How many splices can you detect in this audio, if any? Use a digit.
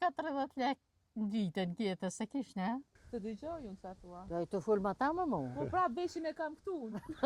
1